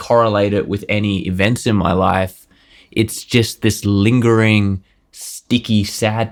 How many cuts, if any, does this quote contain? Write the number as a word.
zero